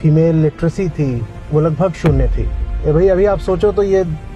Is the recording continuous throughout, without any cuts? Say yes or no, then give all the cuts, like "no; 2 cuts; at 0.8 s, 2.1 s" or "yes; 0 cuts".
no; 1 cut; at 1.3 s